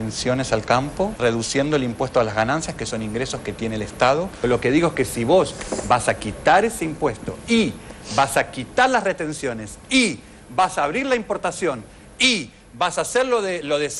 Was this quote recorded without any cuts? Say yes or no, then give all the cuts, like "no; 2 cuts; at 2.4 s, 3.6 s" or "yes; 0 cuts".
no; 1 cut; at 4.3 s